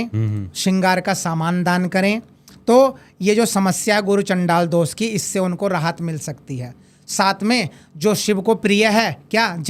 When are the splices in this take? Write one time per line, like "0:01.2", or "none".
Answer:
none